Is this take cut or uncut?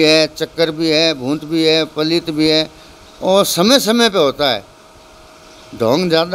uncut